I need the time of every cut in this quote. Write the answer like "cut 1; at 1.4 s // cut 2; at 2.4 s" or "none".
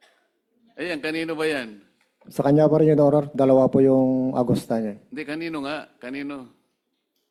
none